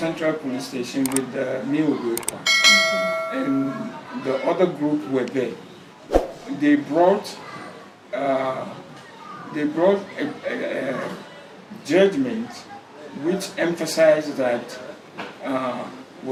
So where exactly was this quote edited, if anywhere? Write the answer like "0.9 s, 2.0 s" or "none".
none